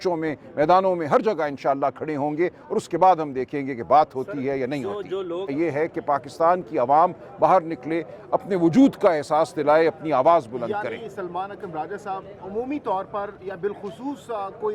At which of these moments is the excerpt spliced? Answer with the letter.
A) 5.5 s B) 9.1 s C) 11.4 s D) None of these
A